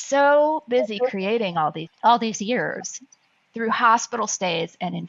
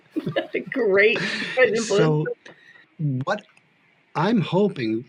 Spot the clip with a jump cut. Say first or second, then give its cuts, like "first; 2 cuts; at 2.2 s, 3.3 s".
first; 1 cut; at 1.9 s